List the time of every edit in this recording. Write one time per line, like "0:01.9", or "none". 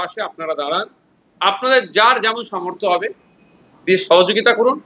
none